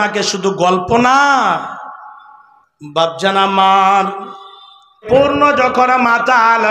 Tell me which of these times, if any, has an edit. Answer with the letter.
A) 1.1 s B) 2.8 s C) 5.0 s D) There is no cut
C